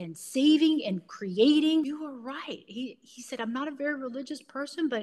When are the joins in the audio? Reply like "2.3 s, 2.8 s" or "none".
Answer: 1.8 s